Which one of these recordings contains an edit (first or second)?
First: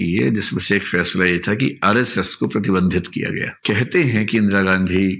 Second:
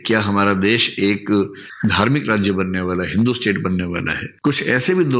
first